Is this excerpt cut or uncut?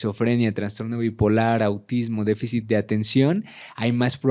uncut